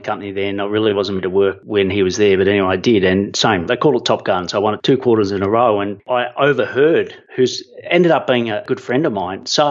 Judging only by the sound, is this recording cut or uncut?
cut